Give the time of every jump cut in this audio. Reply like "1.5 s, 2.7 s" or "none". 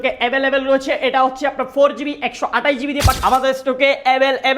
3.1 s